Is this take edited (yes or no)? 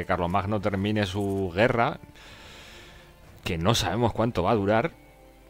no